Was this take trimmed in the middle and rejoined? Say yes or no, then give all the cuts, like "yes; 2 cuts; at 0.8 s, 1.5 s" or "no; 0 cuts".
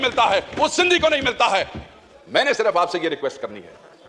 no; 0 cuts